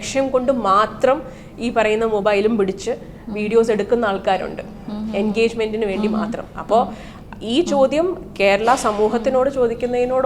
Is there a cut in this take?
no; 0 cuts

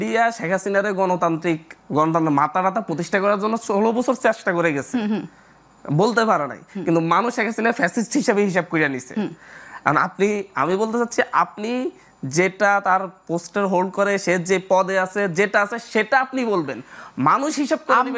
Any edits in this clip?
no; 0 cuts

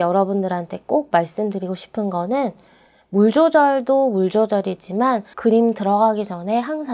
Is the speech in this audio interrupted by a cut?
no; 0 cuts

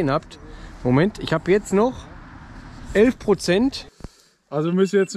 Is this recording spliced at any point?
yes; 1 cut; at 3.9 s

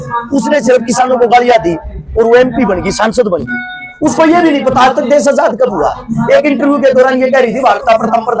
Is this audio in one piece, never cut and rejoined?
yes; 0 cuts

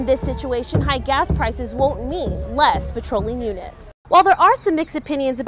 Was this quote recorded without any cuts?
no; 1 cut; at 4.0 s

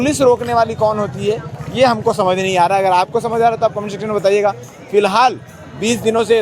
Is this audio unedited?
yes; 0 cuts

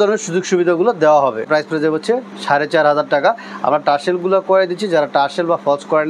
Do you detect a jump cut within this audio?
no; 0 cuts

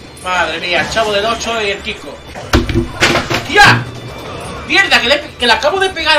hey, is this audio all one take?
no; 1 cut; at 2.3 s

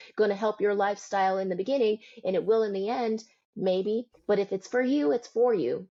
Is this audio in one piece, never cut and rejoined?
yes; 0 cuts

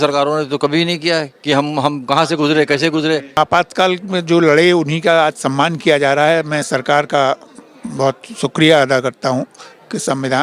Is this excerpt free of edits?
no; 1 cut; at 3.4 s

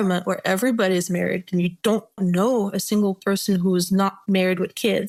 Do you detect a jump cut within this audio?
no; 0 cuts

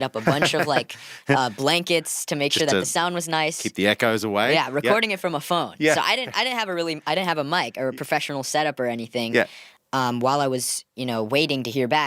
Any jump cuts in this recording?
yes; 1 cut; at 9.6 s

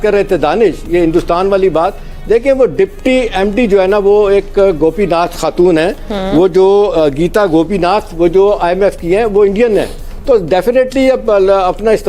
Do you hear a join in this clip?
no; 0 cuts

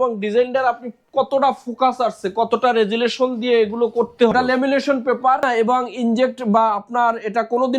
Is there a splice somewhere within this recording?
yes; 2 cuts; at 4.3 s, 5.4 s

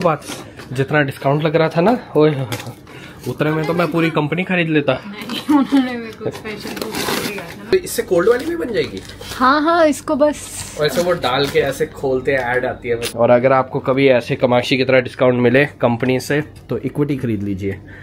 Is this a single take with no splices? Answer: no; 2 cuts; at 7.7 s, 13.1 s

